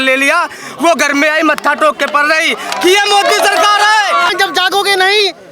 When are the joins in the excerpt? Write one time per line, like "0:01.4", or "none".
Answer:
0:04.3

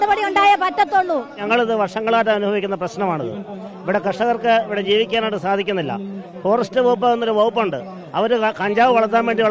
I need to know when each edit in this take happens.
0:01.3

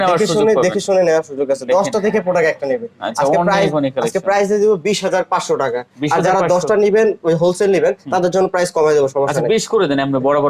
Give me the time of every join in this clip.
none

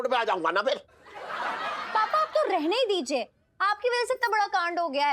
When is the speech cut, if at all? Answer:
none

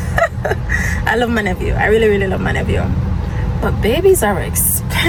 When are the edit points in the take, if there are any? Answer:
none

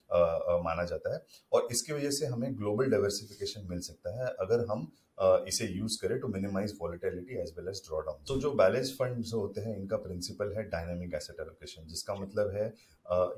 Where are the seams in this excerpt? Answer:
0:08.2

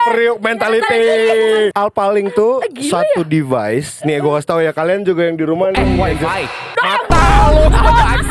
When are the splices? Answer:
0:01.7

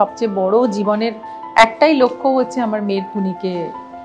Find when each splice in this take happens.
none

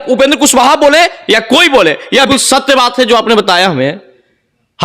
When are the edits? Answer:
0:02.3

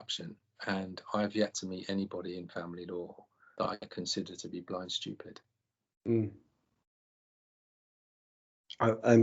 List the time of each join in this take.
none

